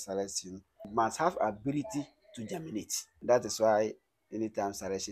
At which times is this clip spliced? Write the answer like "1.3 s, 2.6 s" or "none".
3.1 s